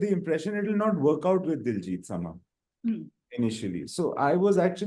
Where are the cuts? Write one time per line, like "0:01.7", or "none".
none